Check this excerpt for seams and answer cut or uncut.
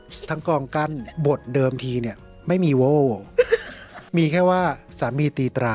cut